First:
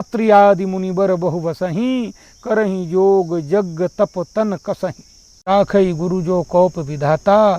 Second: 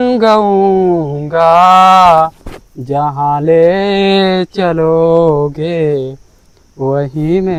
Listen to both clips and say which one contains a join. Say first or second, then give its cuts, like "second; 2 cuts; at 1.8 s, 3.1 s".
first; 1 cut; at 5.5 s